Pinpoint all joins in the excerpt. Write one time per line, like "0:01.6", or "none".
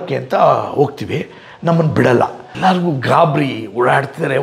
0:02.4